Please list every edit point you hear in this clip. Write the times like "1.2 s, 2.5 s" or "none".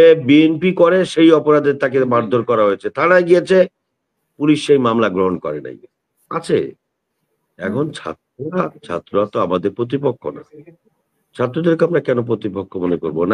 none